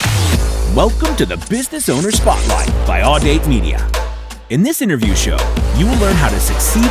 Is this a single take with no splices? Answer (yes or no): yes